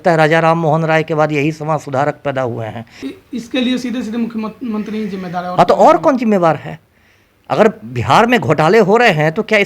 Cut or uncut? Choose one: cut